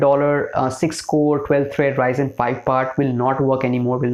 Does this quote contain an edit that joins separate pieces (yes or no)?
no